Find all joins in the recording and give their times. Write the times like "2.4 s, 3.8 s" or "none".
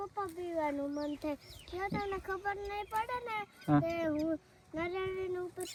none